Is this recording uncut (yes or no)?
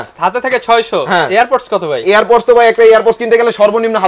yes